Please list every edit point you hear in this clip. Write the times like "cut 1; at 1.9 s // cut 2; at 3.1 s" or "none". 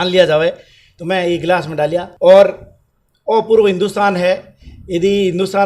cut 1; at 2.1 s

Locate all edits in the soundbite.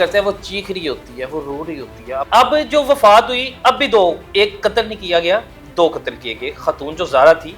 cut 1; at 2.2 s

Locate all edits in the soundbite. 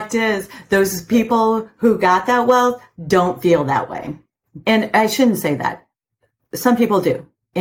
cut 1; at 4.6 s

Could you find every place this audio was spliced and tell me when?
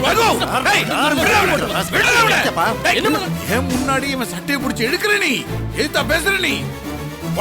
cut 1; at 3.2 s

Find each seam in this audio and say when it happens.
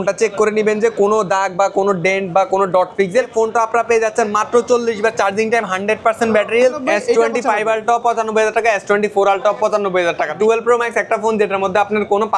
cut 1; at 3.3 s // cut 2; at 6.8 s // cut 3; at 10.3 s

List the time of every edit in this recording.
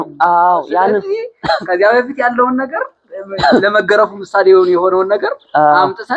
none

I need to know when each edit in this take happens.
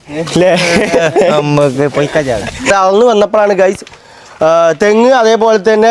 cut 1; at 2.7 s

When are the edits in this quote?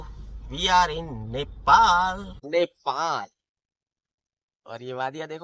cut 1; at 2.3 s

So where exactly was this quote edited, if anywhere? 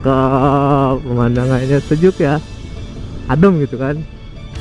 none

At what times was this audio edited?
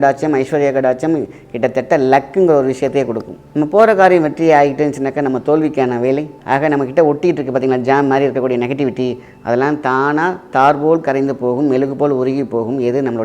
cut 1; at 3.4 s // cut 2; at 6.3 s

